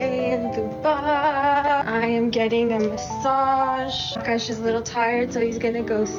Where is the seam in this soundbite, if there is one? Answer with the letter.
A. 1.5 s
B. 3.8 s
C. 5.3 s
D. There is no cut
D